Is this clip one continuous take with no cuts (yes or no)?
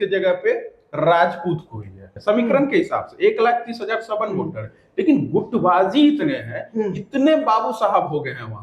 no